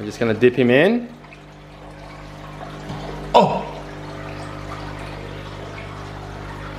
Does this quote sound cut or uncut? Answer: uncut